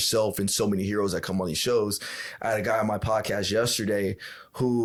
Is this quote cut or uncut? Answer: uncut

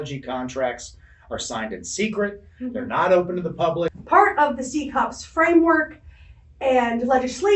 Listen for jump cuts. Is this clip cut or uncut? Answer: cut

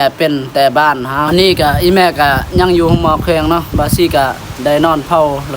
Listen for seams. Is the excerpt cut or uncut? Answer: cut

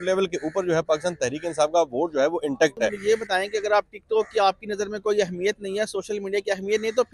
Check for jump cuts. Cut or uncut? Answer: cut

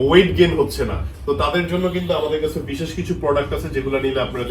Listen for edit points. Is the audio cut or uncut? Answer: uncut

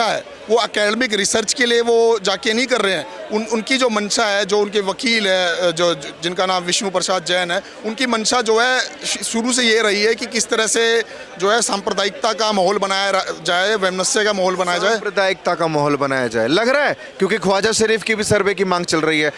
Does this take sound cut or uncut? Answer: uncut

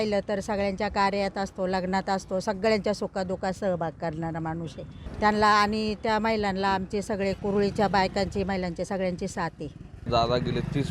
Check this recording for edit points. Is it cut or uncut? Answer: cut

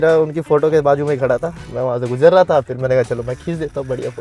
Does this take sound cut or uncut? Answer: cut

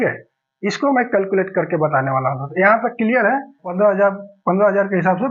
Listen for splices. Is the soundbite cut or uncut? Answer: cut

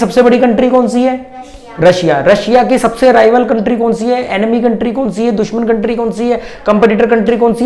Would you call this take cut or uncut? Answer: uncut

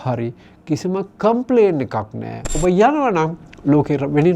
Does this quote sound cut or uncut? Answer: cut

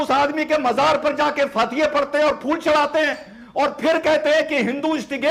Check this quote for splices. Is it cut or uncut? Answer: uncut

